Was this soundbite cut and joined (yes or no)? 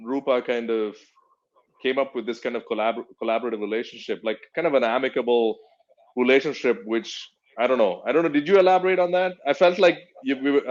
no